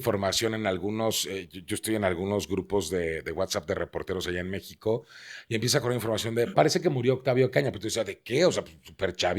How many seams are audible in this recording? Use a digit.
1